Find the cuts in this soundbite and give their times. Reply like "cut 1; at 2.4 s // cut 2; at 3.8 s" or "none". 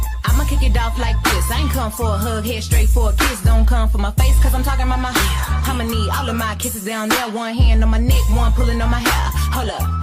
none